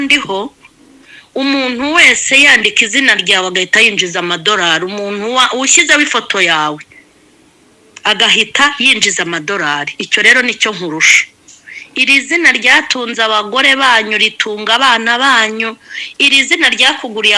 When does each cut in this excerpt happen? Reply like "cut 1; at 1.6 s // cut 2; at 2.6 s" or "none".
none